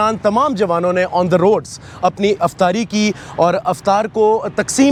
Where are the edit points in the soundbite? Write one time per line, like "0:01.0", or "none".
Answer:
none

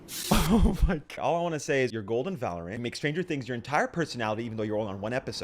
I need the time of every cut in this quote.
0:01.1

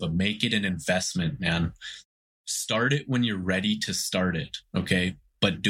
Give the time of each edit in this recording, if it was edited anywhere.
0:01.9

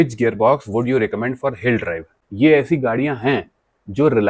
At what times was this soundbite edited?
0:02.1

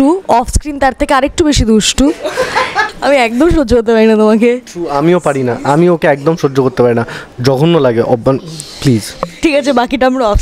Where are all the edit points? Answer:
0:02.9

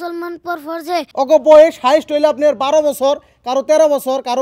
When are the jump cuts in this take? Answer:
0:01.1

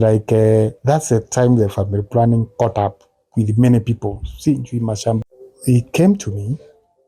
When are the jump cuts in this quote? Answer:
0:05.2

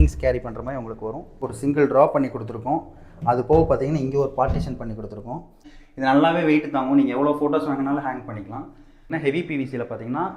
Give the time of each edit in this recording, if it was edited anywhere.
0:01.4
0:05.7
0:09.1

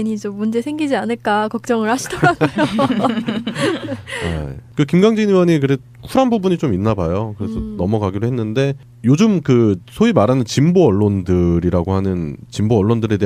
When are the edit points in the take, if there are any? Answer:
none

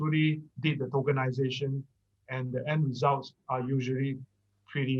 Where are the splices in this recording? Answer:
none

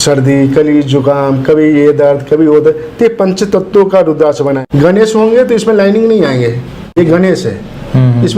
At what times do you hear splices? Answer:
0:04.6
0:07.0

